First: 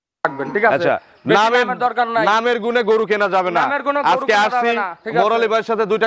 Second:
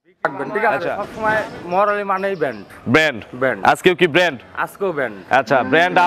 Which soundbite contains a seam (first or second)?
second